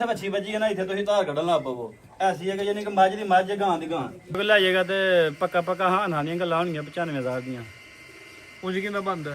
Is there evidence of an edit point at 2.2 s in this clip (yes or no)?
no